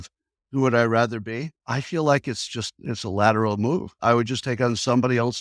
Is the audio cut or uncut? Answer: cut